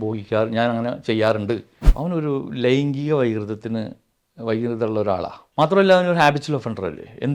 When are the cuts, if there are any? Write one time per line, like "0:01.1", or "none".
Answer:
0:01.9